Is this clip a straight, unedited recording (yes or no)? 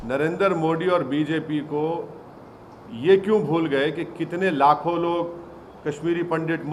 yes